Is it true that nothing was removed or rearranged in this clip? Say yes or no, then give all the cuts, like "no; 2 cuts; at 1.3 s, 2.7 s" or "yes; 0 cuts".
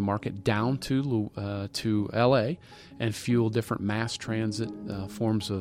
yes; 0 cuts